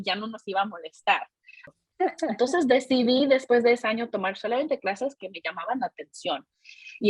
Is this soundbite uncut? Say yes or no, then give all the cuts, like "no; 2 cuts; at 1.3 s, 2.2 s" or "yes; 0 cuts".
no; 1 cut; at 1.7 s